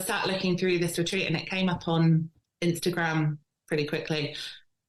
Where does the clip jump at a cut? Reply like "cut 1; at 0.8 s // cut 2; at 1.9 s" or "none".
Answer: cut 1; at 2.4 s